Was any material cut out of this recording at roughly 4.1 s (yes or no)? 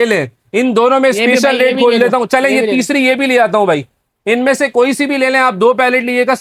no